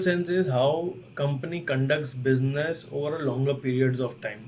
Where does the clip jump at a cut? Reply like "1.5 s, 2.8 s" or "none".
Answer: none